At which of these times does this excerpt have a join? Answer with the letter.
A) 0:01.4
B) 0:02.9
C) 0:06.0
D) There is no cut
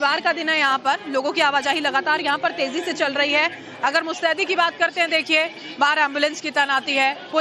B